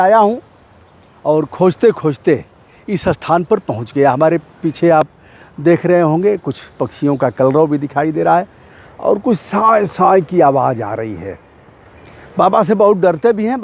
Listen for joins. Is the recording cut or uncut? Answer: uncut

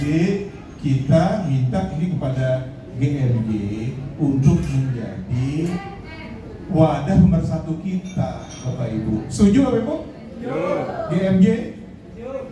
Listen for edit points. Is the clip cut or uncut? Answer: uncut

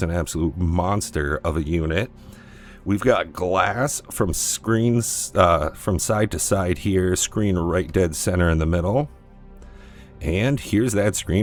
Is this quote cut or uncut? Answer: uncut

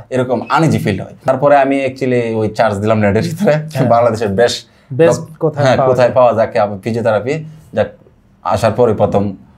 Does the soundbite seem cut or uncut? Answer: cut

